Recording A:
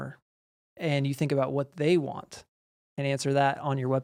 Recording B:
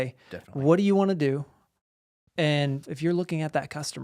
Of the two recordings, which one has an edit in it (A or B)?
B